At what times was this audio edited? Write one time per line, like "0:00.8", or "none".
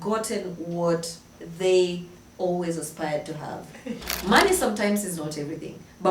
0:04.1